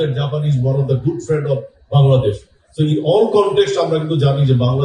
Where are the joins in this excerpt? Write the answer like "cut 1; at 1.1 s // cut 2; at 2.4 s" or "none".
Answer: none